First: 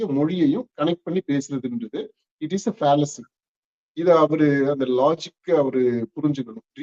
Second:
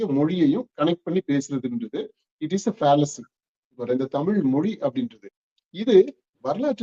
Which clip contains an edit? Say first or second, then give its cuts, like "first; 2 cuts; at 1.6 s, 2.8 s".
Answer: second; 1 cut; at 3.8 s